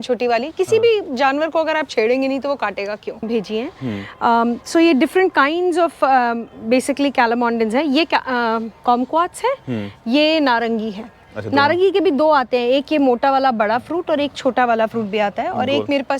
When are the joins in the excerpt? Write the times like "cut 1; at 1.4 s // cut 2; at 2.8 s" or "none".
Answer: cut 1; at 3.3 s